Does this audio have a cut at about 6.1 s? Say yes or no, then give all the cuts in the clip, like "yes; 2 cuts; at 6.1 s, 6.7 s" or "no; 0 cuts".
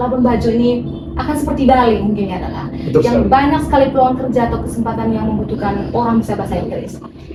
no; 0 cuts